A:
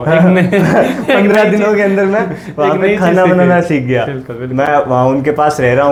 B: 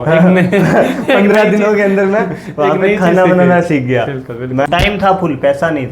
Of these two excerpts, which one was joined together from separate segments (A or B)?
B